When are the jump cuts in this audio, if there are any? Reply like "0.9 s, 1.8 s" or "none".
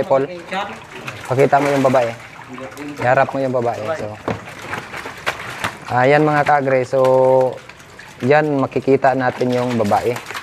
none